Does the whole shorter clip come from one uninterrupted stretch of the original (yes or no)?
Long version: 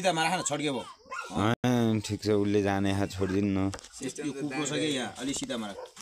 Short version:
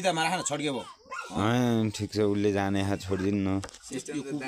no